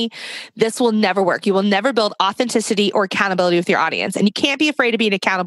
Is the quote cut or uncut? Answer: cut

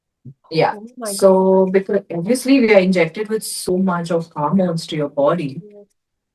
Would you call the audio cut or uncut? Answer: uncut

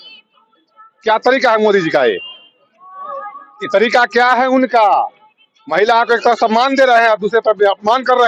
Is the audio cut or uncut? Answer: uncut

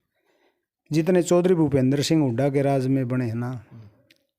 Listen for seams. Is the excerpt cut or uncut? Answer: uncut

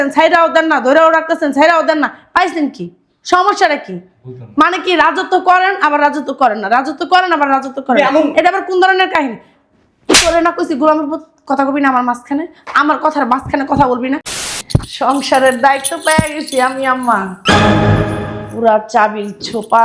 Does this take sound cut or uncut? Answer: cut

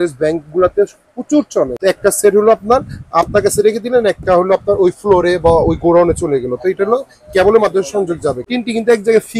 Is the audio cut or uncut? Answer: cut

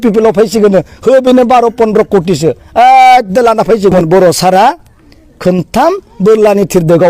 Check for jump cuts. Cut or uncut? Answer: cut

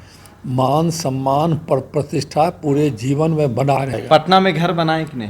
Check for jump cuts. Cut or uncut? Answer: cut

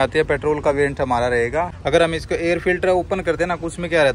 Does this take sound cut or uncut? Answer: cut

